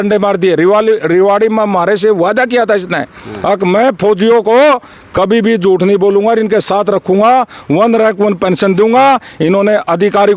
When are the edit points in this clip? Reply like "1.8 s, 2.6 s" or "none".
none